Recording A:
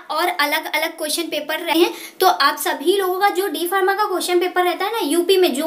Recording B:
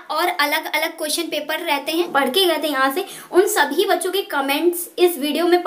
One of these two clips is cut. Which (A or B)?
B